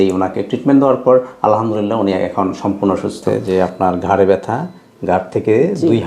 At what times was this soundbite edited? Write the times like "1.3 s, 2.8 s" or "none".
3.3 s